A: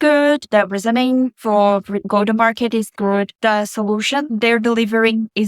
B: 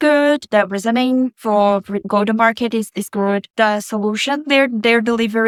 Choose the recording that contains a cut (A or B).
A